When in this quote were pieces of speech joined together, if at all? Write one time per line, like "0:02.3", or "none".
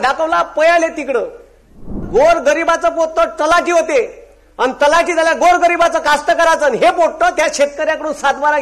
0:02.0